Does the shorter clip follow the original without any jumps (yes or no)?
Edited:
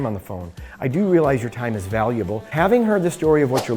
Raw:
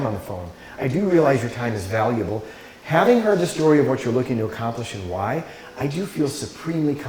no